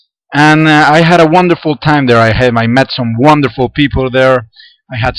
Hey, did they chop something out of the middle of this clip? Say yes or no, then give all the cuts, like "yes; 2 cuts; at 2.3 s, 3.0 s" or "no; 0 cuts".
no; 0 cuts